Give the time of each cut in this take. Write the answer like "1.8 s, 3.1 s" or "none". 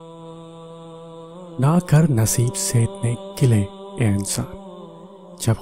1.0 s

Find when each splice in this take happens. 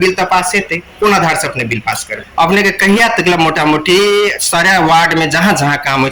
2.2 s

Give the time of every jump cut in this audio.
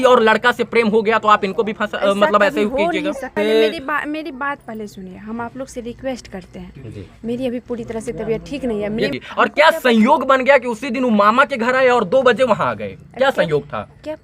3.3 s, 9.2 s

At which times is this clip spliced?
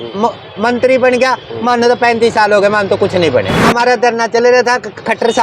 3.6 s

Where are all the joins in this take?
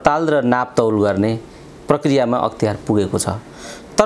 none

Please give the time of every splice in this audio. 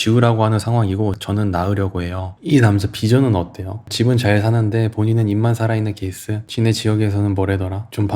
2.3 s, 6.4 s

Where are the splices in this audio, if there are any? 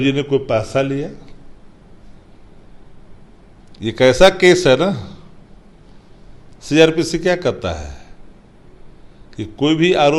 none

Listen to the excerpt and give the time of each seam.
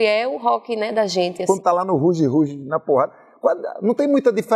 1.4 s

